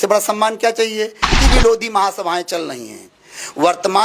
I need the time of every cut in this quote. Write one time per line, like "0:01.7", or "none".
0:01.3